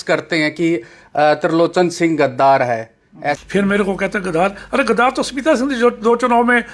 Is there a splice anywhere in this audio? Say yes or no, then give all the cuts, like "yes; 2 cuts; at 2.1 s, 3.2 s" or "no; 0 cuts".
yes; 1 cut; at 3.4 s